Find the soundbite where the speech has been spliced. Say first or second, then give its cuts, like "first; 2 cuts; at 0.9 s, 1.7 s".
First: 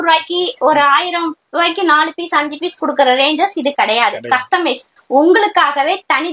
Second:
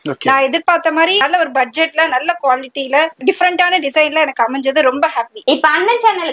second; 3 cuts; at 1.2 s, 3.2 s, 5.3 s